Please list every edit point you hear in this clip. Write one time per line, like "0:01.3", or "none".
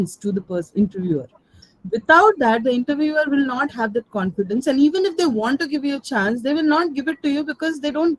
none